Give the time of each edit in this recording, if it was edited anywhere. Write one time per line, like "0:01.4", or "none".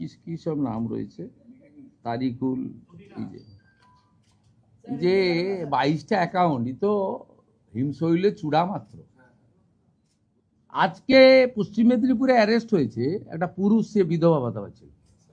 0:10.3